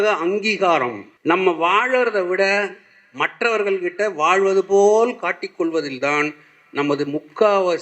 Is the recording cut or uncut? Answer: cut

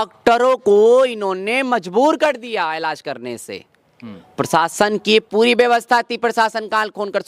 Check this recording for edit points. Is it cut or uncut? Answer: uncut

